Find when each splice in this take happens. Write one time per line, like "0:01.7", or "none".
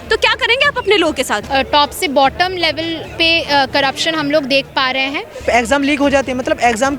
0:01.4
0:05.4